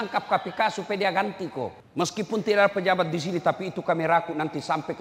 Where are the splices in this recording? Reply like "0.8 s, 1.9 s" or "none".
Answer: 1.8 s